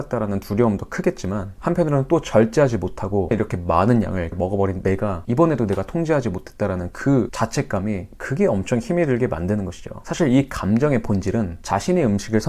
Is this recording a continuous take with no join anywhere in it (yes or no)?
yes